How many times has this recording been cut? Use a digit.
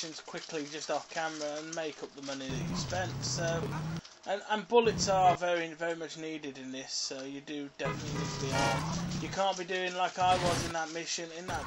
1